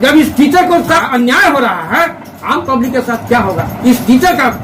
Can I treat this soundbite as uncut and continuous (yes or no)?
no